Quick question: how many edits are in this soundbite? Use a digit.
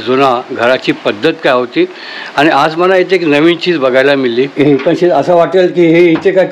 1